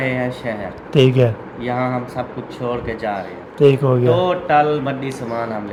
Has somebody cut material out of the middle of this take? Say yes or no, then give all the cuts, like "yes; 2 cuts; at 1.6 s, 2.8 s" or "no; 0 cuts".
no; 0 cuts